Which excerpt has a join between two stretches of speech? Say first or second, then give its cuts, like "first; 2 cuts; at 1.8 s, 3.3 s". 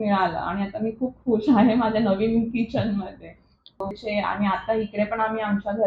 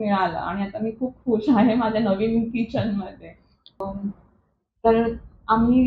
first; 1 cut; at 4.0 s